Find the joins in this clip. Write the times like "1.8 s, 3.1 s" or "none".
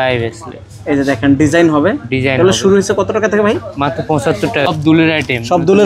4.7 s